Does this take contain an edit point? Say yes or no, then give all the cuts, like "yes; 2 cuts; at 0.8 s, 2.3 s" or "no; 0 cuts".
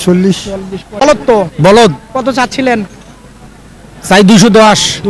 yes; 1 cut; at 1.1 s